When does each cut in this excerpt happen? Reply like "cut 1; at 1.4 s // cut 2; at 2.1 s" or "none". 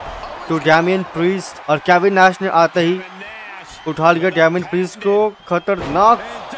cut 1; at 1.6 s